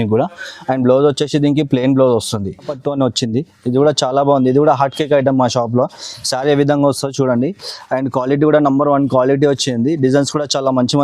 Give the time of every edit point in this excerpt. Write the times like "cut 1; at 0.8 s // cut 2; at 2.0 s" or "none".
cut 1; at 2.8 s